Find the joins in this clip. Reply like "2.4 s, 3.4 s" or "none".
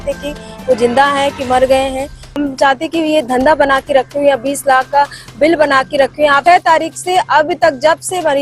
2.4 s, 6.4 s

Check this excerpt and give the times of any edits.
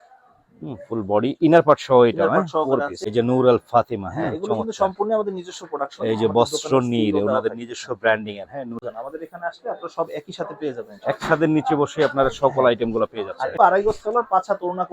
3.0 s, 8.8 s, 13.6 s

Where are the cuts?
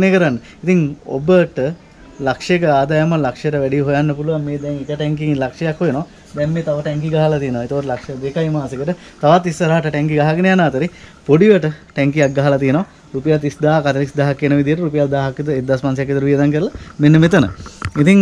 none

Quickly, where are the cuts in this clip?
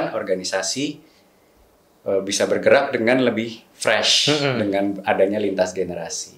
none

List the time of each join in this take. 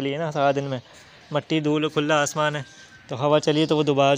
none

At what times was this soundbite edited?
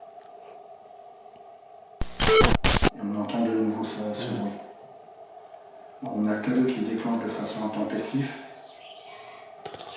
1.9 s, 3.0 s

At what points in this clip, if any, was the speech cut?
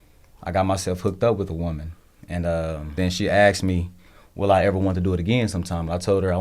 3.0 s

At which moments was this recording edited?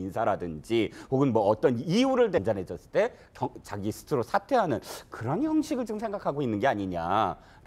none

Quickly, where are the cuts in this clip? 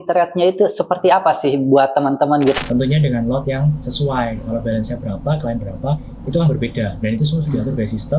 2.6 s

